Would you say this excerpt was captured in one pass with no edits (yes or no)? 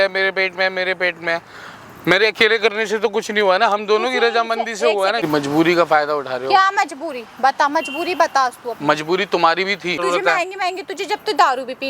no